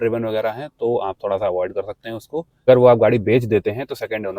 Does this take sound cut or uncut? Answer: cut